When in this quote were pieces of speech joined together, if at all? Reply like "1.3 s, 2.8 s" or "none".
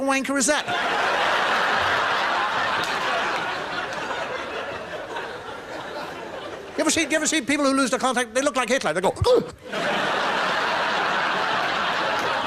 none